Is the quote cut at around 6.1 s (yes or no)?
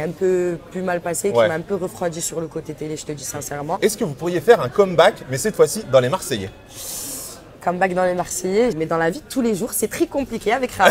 no